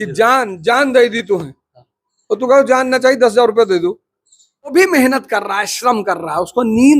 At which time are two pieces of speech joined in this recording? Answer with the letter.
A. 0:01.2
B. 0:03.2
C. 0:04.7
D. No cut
C